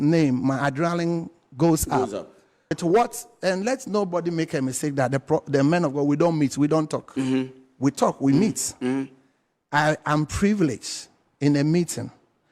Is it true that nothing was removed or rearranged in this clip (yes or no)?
no